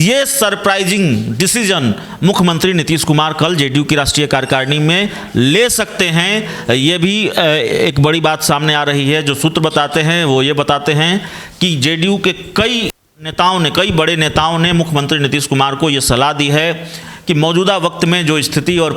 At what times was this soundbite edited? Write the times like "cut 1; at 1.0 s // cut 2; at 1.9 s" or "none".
none